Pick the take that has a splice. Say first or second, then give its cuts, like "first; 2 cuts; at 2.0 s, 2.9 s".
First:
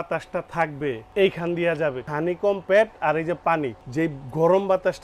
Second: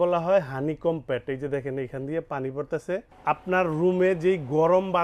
first; 3 cuts; at 1.0 s, 2.1 s, 3.8 s